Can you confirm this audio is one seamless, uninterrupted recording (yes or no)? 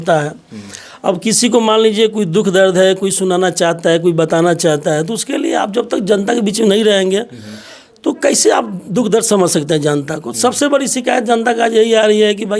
yes